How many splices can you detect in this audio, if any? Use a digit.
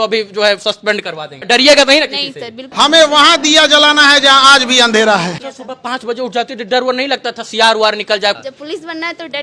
4